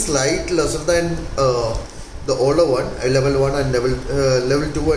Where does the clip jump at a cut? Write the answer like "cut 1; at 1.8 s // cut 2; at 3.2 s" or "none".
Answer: none